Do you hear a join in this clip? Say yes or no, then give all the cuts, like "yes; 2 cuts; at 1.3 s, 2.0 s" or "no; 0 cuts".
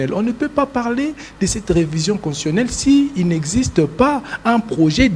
no; 0 cuts